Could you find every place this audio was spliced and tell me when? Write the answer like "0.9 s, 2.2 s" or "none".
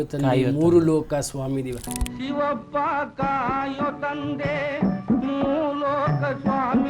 1.8 s

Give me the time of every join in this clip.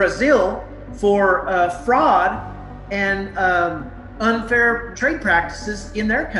4.9 s

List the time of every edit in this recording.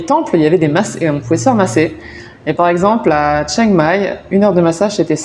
none

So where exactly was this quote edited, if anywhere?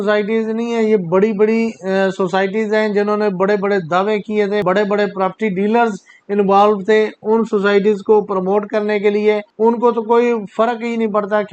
4.6 s, 9.5 s

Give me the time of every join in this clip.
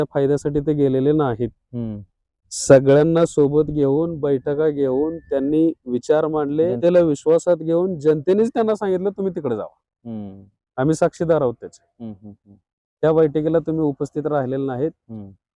6.8 s

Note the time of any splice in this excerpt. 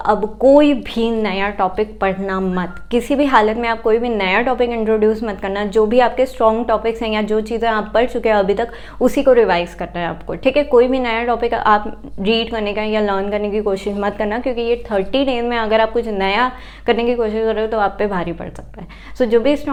none

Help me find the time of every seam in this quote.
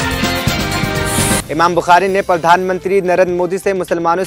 1.4 s

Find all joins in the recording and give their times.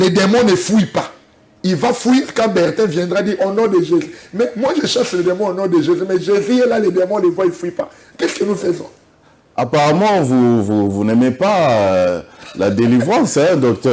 none

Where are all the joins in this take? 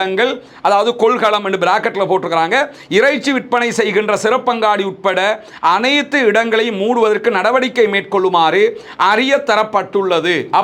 none

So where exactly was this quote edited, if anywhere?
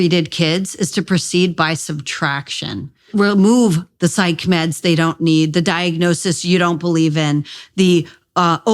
3.1 s

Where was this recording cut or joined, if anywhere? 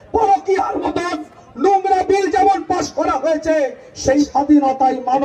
4.2 s

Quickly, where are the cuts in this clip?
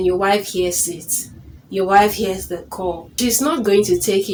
none

